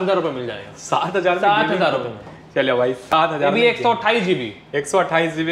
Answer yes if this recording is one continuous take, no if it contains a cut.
yes